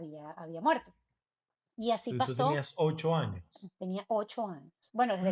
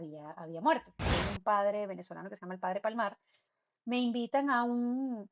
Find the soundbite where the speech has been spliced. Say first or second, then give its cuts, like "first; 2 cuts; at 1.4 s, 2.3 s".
second; 1 cut; at 1.1 s